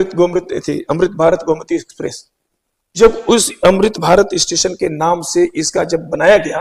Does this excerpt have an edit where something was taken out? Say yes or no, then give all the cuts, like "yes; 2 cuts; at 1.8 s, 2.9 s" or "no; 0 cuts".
no; 0 cuts